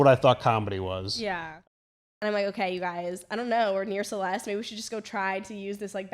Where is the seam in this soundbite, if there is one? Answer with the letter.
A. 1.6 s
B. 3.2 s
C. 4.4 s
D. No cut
A